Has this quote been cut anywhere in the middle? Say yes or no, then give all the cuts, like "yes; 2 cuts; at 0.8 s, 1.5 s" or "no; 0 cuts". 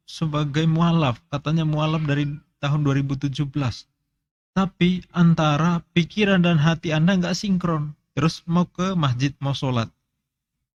no; 0 cuts